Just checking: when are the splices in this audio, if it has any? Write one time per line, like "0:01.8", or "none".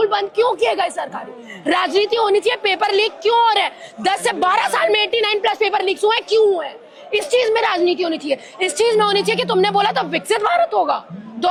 none